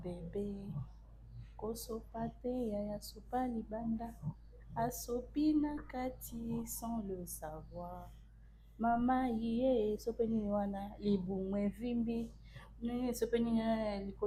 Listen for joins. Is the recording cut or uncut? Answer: uncut